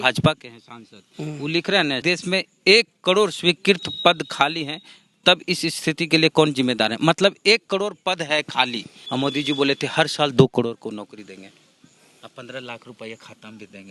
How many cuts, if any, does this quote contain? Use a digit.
2